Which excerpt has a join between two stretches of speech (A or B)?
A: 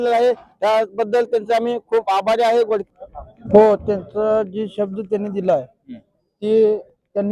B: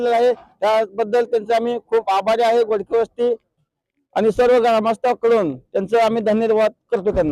A